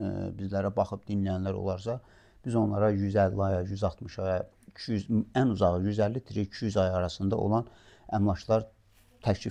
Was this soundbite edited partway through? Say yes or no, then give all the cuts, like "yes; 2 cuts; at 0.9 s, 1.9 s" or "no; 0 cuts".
no; 0 cuts